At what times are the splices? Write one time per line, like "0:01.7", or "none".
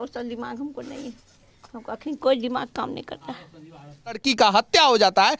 0:04.2